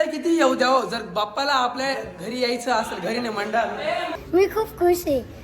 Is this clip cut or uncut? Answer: cut